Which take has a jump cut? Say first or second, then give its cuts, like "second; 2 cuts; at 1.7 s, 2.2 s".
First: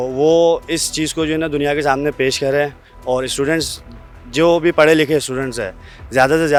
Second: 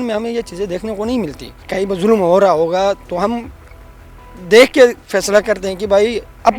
second; 1 cut; at 1.6 s